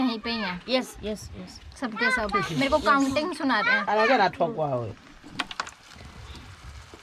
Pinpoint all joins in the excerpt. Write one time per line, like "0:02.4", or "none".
none